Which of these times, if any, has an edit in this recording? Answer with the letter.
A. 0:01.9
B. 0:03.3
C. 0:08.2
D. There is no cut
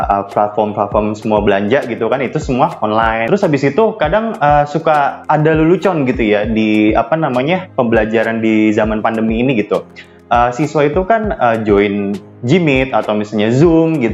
B